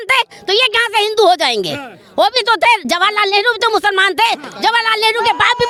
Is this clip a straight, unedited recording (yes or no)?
yes